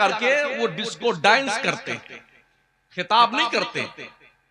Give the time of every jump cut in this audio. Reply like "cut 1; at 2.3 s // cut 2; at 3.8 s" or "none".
none